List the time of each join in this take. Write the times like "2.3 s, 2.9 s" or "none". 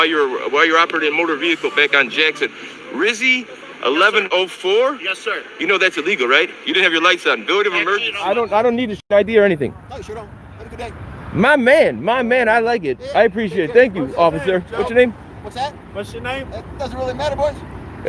8.1 s